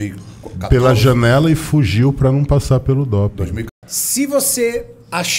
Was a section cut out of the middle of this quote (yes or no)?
yes